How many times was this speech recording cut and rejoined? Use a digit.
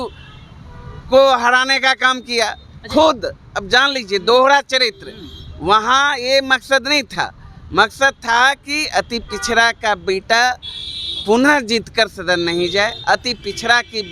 0